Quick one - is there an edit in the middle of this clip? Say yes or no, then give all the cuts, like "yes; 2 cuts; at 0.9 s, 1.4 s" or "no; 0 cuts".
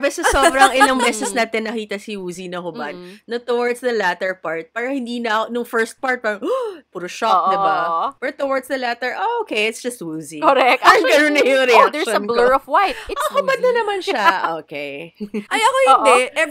no; 0 cuts